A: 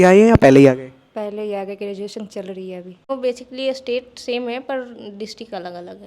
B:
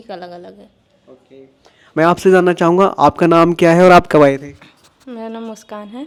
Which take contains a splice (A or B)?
A